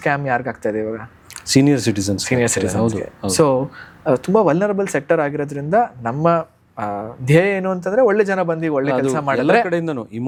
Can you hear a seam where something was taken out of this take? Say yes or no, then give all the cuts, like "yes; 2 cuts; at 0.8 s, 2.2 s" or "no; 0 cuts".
no; 0 cuts